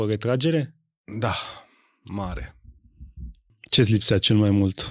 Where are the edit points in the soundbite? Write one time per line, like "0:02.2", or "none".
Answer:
0:03.6

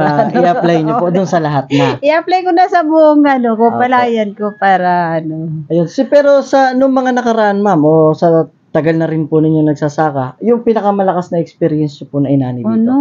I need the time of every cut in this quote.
none

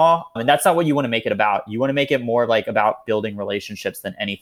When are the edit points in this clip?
none

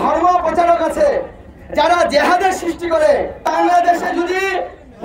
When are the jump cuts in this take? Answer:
0:03.4

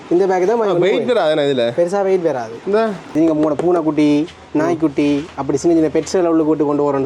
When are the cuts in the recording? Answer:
0:03.0

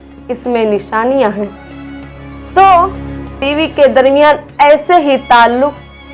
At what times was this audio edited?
0:03.4

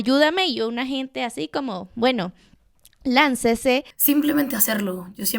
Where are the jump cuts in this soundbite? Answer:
0:03.9

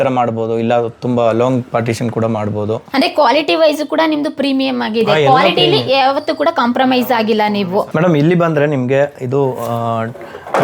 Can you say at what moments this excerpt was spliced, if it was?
0:02.8
0:07.9

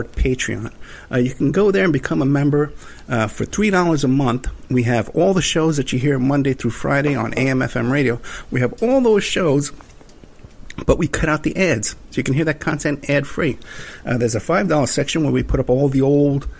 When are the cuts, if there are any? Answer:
none

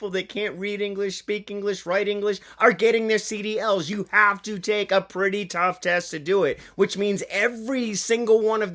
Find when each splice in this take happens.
none

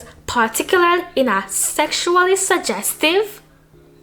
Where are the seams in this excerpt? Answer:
none

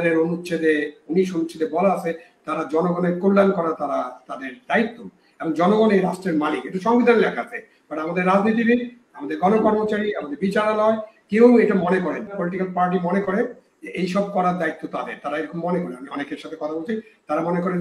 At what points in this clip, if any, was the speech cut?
0:12.4

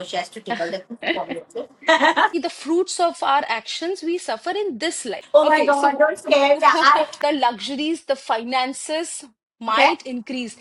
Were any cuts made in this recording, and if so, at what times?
0:02.3
0:05.1
0:07.1

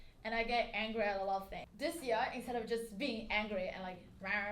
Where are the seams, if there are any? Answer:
0:01.6

